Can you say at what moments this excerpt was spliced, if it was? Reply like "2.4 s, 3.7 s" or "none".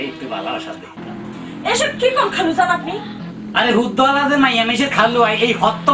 1.0 s